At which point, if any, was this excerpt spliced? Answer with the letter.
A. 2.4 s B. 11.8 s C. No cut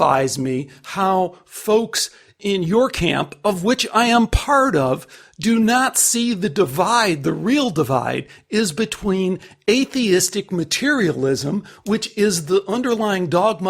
A